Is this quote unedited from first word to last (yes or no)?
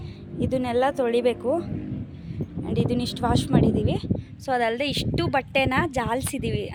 yes